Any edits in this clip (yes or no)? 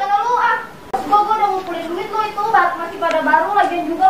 yes